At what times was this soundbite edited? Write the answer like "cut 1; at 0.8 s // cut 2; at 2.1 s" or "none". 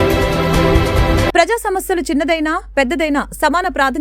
none